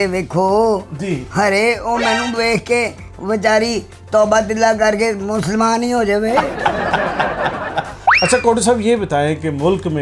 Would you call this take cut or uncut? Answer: cut